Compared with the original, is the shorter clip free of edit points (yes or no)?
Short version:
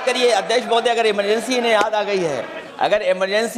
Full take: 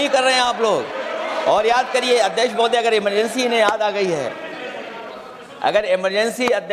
no